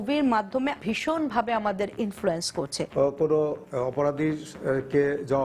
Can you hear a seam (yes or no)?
yes